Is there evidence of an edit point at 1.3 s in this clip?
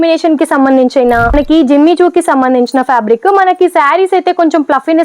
yes; 1 cut; at 1.3 s

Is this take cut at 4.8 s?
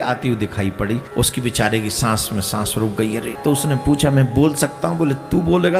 no; 2 cuts; at 1.1 s, 3.3 s

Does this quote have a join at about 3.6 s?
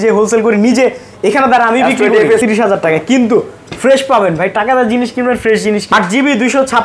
no; 2 cuts; at 2.4 s, 5.8 s

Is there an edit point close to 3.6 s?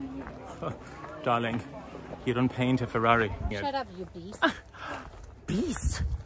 yes; 1 cut; at 3.6 s

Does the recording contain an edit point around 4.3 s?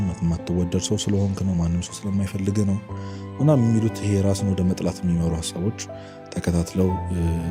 no; 0 cuts

